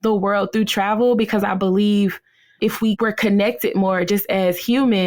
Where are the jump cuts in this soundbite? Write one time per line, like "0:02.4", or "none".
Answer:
none